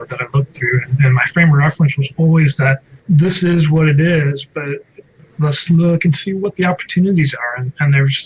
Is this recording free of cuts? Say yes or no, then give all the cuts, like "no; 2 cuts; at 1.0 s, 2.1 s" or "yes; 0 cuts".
no; 1 cut; at 2.9 s